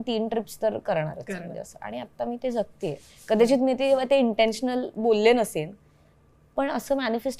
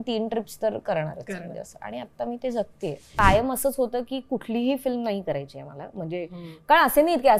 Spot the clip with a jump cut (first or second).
second